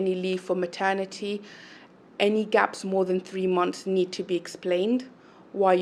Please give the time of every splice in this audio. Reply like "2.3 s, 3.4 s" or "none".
none